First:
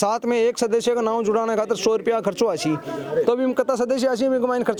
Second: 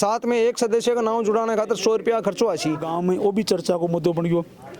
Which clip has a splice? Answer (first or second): second